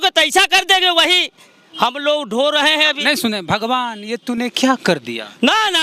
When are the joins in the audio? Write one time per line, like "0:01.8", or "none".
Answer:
none

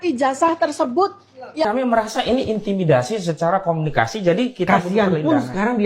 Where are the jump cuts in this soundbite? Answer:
0:01.6

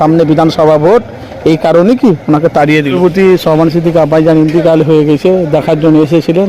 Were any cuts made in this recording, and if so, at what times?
0:03.0

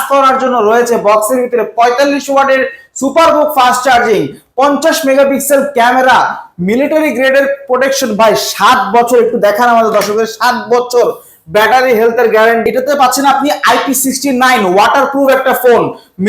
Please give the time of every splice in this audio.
0:12.6

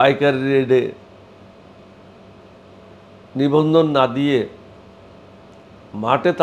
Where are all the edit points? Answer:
none

